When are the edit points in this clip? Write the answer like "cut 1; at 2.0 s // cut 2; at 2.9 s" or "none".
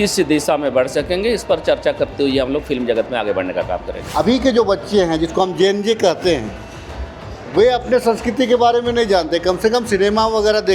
cut 1; at 4.0 s